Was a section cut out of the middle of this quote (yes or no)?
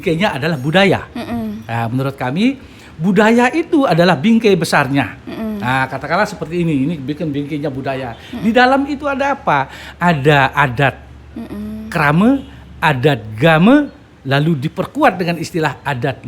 no